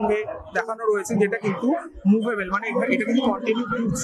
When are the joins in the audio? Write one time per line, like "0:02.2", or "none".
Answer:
none